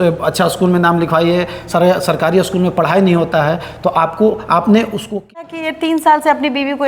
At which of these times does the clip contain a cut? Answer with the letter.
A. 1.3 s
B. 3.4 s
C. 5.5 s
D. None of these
C